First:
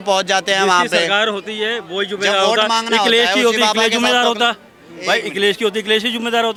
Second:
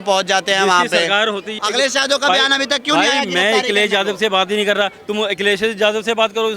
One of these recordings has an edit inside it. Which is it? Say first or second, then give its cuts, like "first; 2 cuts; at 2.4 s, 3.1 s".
second; 1 cut; at 1.6 s